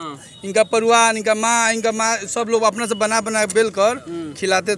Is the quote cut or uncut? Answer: uncut